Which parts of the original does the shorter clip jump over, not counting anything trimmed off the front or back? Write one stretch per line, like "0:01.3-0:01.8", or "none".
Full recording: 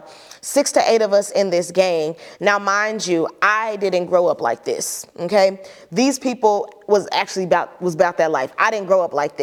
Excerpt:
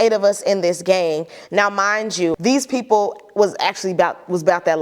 0:03.3-0:05.9